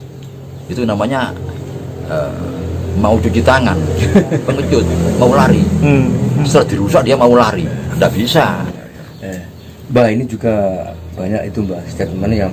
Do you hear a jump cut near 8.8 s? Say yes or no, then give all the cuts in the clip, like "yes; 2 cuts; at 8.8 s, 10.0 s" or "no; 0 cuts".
yes; 1 cut; at 8.8 s